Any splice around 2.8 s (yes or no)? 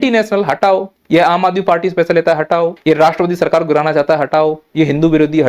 yes